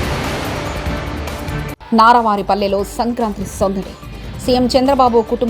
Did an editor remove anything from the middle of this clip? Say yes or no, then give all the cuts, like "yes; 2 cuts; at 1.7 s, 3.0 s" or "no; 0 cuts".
yes; 1 cut; at 1.6 s